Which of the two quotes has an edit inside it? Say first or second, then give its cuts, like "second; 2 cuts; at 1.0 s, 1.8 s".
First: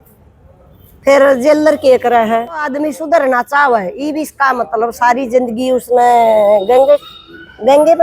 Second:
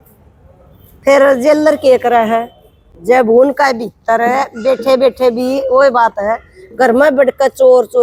first; 1 cut; at 2.7 s